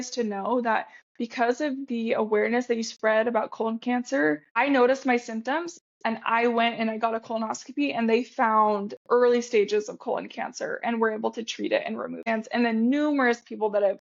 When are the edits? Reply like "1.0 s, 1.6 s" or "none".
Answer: 4.6 s, 12.2 s

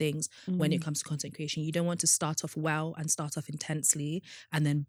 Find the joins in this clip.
none

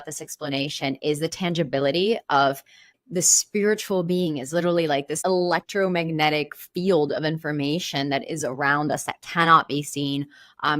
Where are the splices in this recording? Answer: 2.9 s, 5.2 s

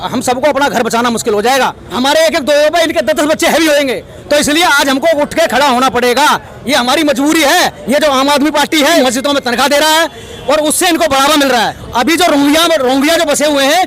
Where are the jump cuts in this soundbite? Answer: 1.9 s, 7.8 s, 9.0 s, 11.8 s

